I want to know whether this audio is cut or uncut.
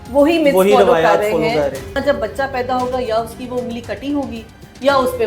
cut